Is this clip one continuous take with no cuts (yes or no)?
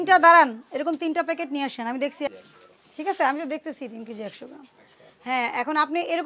yes